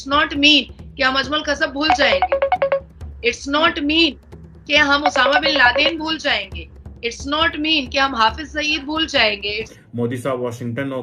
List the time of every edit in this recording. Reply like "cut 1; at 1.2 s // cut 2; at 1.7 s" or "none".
cut 1; at 9.7 s

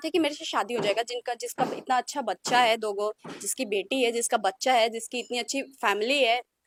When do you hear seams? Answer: none

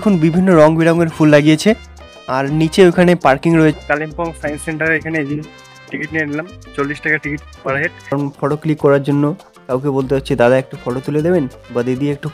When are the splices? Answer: cut 1; at 3.8 s // cut 2; at 8.1 s

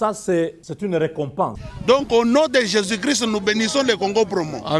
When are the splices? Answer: cut 1; at 1.7 s

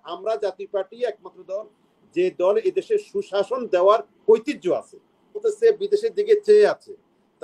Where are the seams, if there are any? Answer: cut 1; at 5.4 s

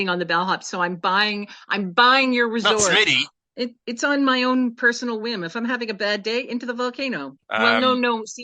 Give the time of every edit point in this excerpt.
cut 1; at 3.5 s // cut 2; at 7.4 s

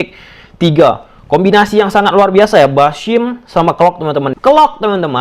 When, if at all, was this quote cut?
cut 1; at 4.3 s

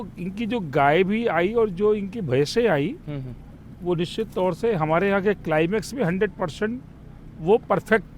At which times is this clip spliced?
none

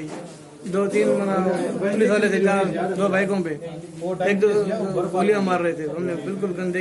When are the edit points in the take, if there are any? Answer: cut 1; at 5.6 s

